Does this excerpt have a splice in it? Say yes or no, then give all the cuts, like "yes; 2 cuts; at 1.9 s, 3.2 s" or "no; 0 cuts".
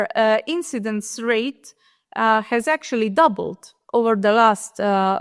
no; 0 cuts